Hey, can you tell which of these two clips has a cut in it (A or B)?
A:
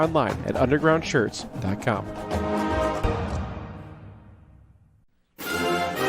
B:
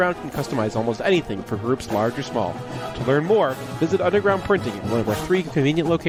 A